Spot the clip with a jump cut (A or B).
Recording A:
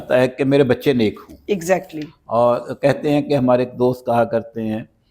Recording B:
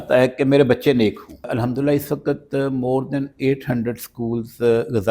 B